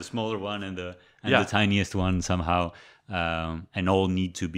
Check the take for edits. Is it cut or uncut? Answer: uncut